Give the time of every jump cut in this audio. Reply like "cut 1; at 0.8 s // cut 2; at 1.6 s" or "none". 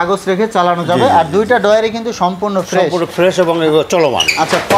none